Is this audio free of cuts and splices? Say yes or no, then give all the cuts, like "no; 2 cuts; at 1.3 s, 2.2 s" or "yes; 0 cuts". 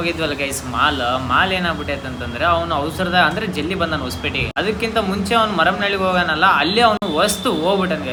yes; 0 cuts